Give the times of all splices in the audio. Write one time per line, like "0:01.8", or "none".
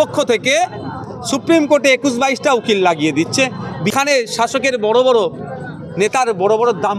0:03.9